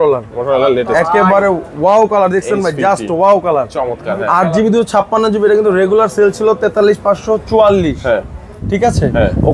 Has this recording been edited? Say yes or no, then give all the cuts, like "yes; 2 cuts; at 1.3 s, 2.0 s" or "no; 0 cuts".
no; 0 cuts